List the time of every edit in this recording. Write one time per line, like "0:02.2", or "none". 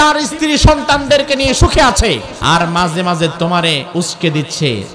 0:02.3
0:03.8